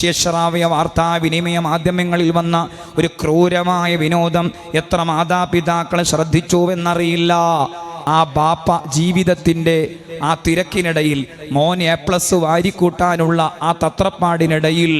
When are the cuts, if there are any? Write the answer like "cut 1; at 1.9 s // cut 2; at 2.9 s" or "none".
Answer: cut 1; at 7.9 s